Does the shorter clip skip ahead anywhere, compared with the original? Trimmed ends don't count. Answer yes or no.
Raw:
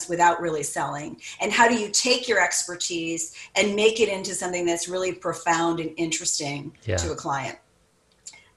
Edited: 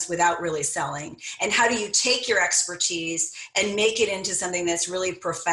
no